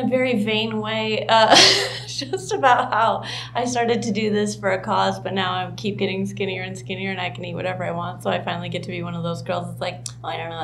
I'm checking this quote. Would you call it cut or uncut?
uncut